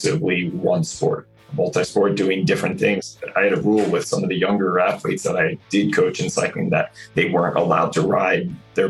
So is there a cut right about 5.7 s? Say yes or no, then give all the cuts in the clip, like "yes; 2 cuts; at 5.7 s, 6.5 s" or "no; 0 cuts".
no; 2 cuts; at 1.4 s, 3.1 s